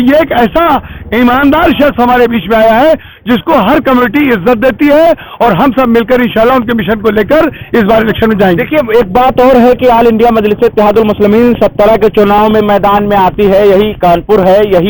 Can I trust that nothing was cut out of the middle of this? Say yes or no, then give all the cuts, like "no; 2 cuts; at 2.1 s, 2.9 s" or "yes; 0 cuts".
yes; 0 cuts